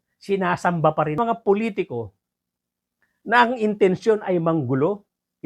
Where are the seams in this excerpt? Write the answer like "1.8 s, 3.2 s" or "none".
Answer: 1.2 s